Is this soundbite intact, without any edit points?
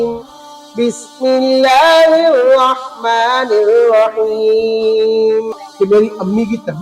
no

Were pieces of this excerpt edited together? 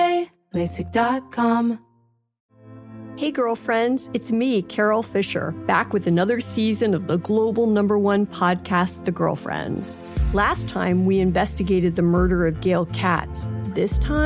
yes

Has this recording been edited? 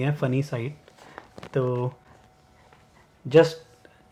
no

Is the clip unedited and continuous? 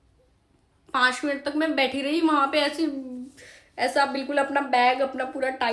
yes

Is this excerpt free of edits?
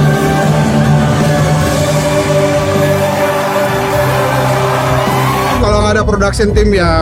no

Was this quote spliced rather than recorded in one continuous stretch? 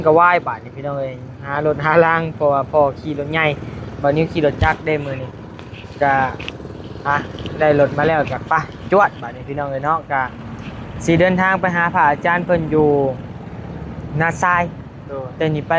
no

